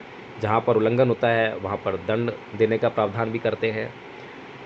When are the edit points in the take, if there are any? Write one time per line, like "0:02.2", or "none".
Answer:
none